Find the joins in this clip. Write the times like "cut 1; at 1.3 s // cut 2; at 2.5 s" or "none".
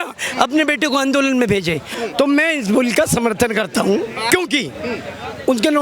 cut 1; at 1.9 s // cut 2; at 4.2 s